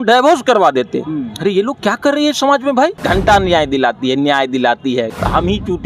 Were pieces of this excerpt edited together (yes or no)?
yes